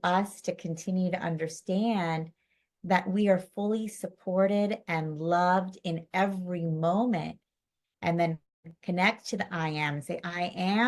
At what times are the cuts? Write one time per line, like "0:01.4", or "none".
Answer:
none